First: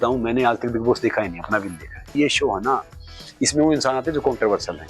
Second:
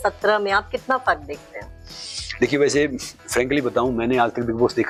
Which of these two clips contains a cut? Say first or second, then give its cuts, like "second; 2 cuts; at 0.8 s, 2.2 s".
first; 1 cut; at 2.1 s